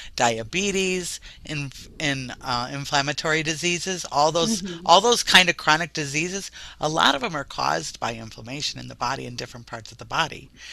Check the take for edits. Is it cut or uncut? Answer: uncut